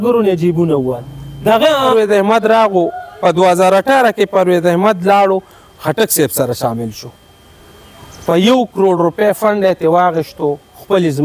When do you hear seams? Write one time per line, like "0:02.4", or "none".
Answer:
0:01.9